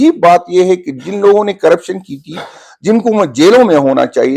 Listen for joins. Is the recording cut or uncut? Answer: uncut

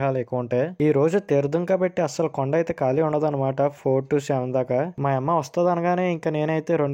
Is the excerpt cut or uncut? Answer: uncut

